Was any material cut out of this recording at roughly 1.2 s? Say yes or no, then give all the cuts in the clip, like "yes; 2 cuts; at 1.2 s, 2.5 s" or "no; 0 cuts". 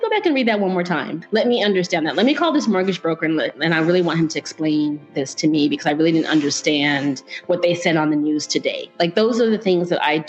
yes; 1 cut; at 1.2 s